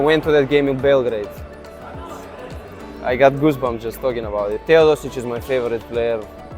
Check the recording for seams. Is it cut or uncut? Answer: cut